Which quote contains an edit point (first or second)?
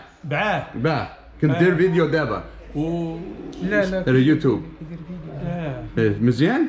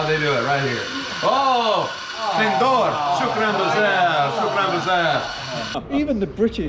second